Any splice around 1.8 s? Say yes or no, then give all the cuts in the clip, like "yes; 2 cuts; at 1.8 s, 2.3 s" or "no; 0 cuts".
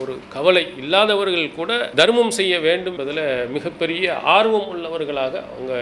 yes; 2 cuts; at 1.8 s, 3.0 s